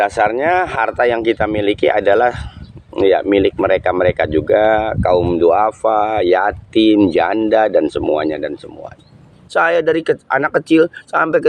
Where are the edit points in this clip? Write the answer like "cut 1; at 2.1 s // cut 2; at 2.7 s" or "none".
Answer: cut 1; at 9.4 s